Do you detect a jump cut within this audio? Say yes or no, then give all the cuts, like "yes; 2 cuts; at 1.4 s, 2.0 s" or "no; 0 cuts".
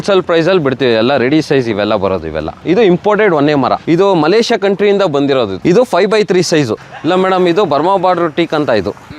yes; 3 cuts; at 2.5 s, 3.8 s, 6.8 s